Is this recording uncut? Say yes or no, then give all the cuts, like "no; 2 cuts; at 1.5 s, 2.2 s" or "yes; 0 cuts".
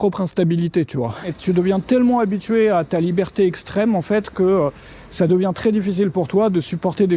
no; 1 cut; at 1.3 s